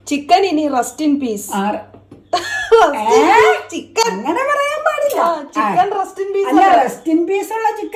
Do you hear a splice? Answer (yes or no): no